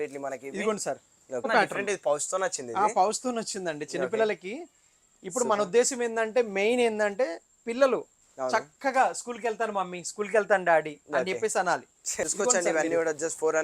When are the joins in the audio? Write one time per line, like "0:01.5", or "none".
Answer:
0:01.5
0:12.2